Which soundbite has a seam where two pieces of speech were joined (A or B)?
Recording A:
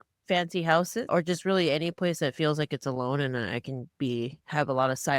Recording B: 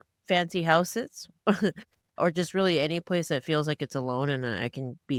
A